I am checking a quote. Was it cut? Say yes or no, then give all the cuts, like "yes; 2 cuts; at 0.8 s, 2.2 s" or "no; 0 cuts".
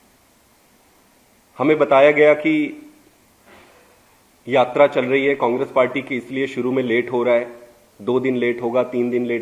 no; 0 cuts